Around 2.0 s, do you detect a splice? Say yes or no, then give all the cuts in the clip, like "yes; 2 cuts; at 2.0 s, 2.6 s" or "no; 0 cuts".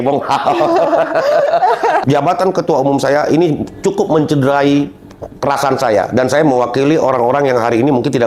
yes; 1 cut; at 2.0 s